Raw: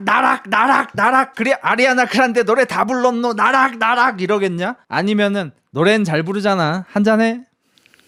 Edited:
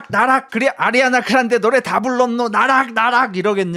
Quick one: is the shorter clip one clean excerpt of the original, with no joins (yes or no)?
yes